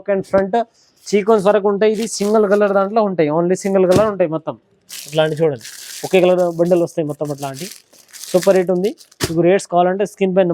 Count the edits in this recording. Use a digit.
0